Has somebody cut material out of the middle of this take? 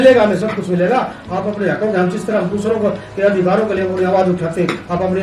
no; 0 cuts

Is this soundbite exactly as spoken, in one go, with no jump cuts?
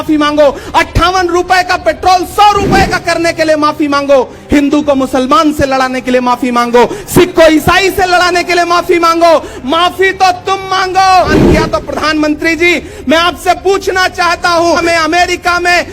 no; 2 cuts; at 11.3 s, 14.8 s

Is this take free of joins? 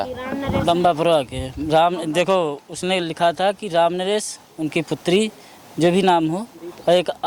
yes; 0 cuts

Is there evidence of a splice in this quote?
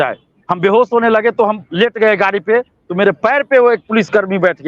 no; 0 cuts

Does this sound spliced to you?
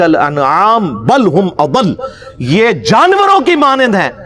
no; 0 cuts

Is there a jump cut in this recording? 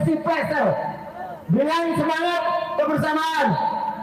yes; 1 cut; at 1.3 s

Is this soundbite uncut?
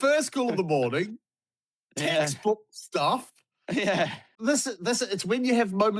no; 1 cut; at 4.3 s

